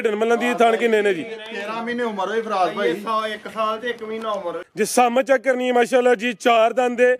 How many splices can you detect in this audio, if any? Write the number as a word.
one